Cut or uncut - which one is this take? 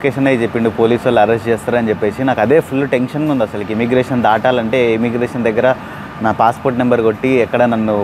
uncut